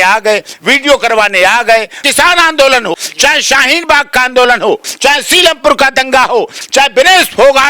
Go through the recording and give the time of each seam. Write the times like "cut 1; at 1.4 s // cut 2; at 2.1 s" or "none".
cut 1; at 2.0 s // cut 2; at 2.9 s // cut 3; at 4.9 s // cut 4; at 6.6 s